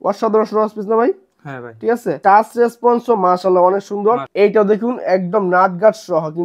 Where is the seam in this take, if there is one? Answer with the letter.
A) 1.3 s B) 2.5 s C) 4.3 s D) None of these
C